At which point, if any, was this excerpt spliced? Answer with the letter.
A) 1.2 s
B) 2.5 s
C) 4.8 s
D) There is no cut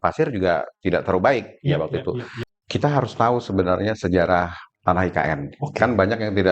B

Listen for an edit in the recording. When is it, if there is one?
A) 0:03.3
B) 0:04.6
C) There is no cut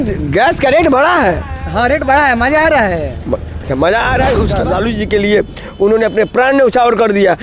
B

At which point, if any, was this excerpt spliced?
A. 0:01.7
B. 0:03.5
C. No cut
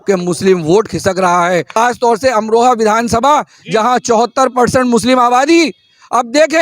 A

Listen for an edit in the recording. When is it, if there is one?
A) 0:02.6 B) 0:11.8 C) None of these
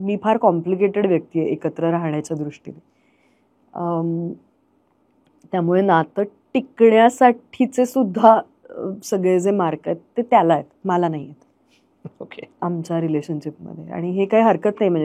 C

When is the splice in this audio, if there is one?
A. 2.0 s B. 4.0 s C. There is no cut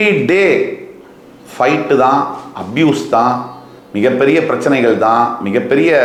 C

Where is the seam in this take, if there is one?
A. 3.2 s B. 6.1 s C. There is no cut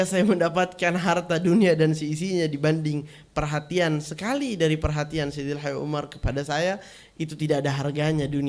C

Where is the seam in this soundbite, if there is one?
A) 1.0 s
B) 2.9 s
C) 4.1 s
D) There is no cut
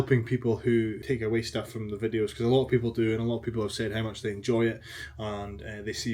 A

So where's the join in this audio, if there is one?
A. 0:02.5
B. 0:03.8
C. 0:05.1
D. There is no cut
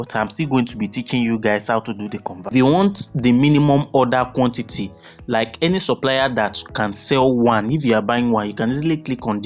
A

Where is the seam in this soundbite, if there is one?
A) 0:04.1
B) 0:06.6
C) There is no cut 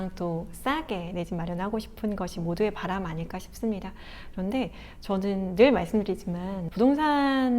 B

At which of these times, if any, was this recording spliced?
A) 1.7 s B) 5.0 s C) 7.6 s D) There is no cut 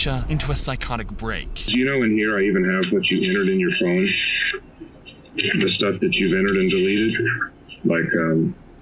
A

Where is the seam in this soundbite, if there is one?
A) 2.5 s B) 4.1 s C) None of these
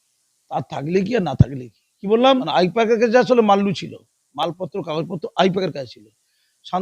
A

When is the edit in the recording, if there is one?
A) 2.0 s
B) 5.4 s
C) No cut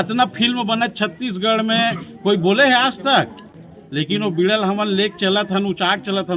C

